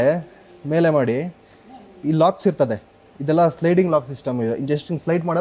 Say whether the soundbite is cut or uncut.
uncut